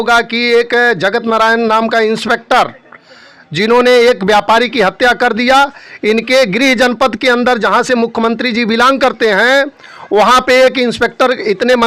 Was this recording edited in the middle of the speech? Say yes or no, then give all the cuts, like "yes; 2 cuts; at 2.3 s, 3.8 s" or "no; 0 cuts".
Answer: no; 0 cuts